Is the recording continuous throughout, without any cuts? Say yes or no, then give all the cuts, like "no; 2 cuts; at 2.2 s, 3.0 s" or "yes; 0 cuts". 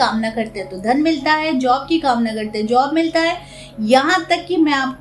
yes; 0 cuts